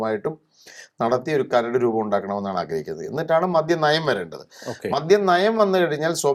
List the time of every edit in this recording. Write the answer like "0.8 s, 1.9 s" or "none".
none